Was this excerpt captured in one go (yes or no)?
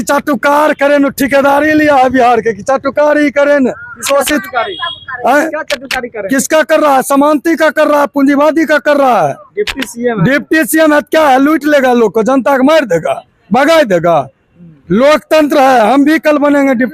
yes